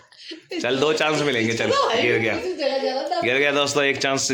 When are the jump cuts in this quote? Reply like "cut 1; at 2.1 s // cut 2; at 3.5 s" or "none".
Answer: none

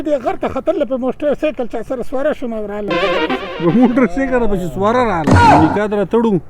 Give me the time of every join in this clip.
cut 1; at 5.4 s

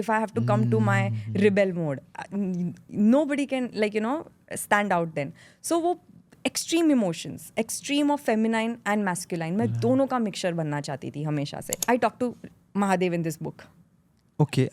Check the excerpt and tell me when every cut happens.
cut 1; at 11.7 s

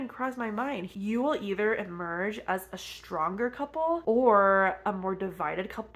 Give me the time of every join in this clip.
cut 1; at 0.9 s // cut 2; at 4.8 s

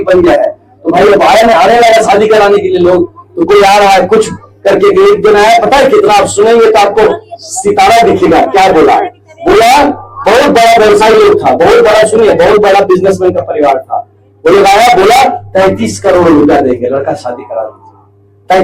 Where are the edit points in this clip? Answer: none

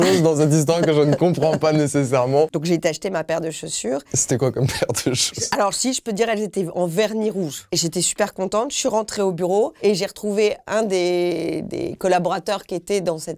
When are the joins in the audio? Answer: cut 1; at 2.6 s // cut 2; at 7.6 s // cut 3; at 9.7 s

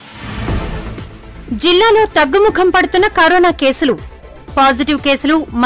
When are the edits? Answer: cut 1; at 0.9 s

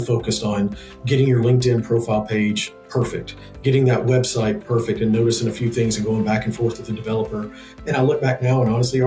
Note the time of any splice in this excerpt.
none

